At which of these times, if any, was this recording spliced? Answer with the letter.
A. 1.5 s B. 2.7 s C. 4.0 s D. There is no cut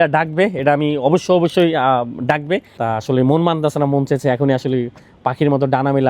B